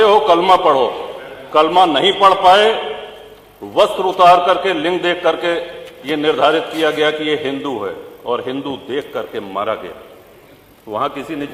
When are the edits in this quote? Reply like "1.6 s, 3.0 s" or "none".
none